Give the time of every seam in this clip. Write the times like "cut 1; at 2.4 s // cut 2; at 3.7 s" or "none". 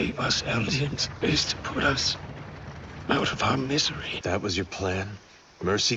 cut 1; at 1.0 s // cut 2; at 4.1 s